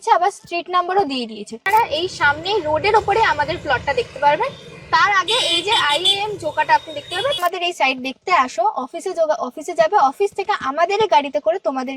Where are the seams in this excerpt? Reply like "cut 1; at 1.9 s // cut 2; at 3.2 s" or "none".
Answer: cut 1; at 1.6 s // cut 2; at 7.4 s